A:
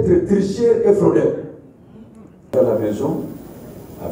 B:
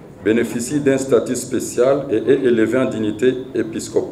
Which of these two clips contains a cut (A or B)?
A